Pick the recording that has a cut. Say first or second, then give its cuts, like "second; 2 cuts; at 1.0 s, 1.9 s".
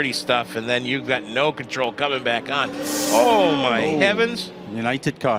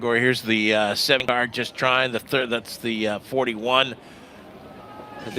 second; 1 cut; at 1.2 s